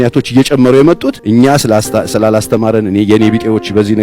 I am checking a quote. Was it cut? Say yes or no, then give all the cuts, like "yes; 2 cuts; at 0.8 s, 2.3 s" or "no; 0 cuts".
yes; 1 cut; at 1.1 s